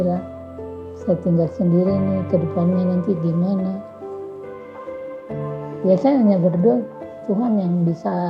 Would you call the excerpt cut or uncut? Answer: cut